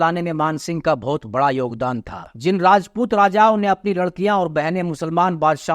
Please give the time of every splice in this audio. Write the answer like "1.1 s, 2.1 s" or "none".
2.2 s